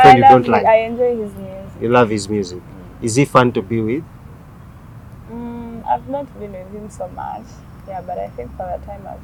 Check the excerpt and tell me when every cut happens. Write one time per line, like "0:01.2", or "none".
none